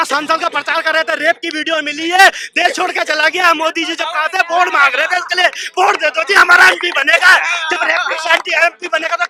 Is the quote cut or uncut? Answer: uncut